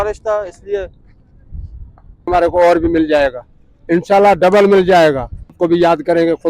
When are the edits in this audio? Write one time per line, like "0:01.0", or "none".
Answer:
0:02.3
0:05.6